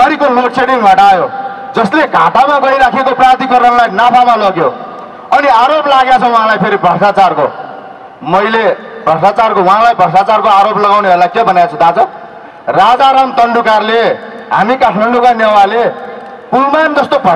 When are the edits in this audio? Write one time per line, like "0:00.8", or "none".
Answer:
none